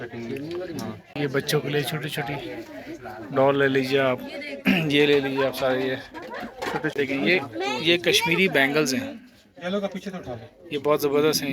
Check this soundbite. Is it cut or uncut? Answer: cut